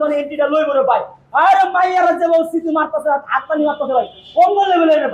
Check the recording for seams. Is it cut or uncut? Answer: uncut